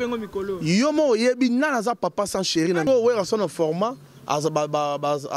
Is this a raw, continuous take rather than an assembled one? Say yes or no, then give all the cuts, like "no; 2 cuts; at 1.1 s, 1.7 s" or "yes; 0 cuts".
no; 1 cut; at 2.9 s